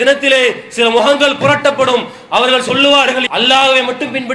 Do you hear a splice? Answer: yes; 1 cut; at 3.2 s

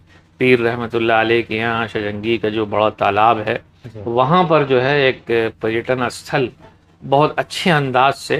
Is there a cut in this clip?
no; 0 cuts

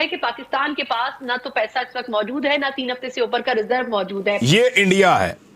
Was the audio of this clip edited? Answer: yes; 1 cut; at 4.4 s

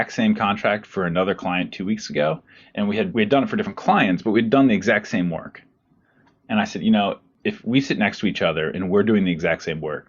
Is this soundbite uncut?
no; 2 cuts; at 3.1 s, 7.3 s

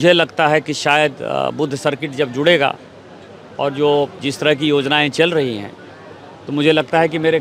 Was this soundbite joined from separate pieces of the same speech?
no; 0 cuts

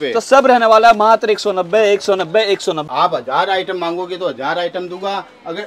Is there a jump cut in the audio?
yes; 1 cut; at 2.8 s

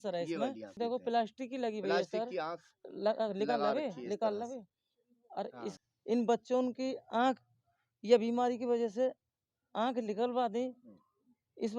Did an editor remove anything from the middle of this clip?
yes; 2 cuts; at 0.8 s, 5.7 s

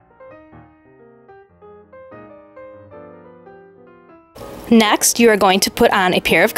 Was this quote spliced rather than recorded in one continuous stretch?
no; 0 cuts

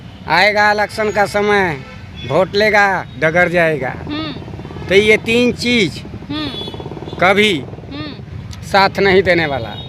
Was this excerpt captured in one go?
yes; 0 cuts

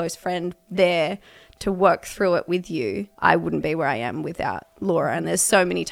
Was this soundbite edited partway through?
yes; 1 cut; at 3.1 s

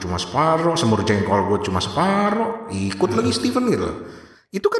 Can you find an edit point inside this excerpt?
no; 0 cuts

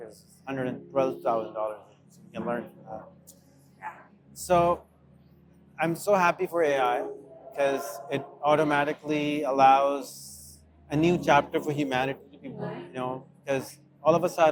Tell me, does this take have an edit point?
no; 0 cuts

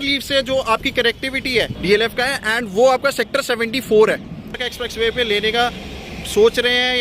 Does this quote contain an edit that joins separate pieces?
yes; 2 cuts; at 1.8 s, 4.6 s

